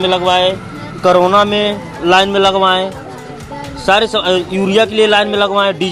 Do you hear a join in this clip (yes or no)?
no